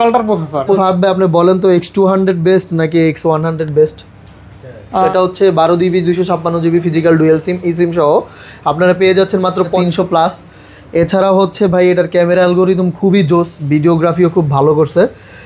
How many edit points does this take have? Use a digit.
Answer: 3